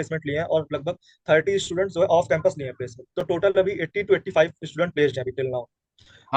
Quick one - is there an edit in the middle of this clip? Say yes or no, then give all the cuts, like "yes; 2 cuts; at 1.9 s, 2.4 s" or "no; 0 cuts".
no; 0 cuts